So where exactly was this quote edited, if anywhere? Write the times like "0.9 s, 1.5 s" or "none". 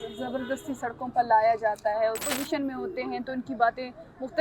2.3 s